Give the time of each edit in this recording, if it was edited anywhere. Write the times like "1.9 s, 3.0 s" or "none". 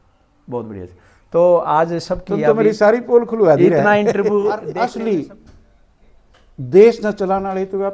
4.7 s